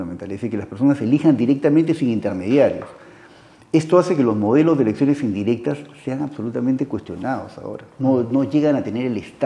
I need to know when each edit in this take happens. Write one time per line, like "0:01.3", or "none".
none